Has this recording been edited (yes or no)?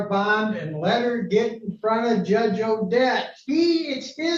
no